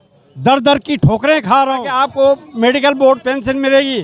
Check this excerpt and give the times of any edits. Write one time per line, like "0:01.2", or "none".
0:01.9